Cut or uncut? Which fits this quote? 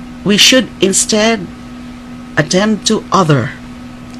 uncut